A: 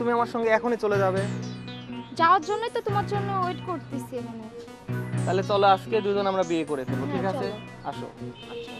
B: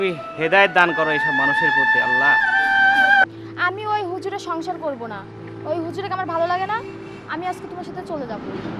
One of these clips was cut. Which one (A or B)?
B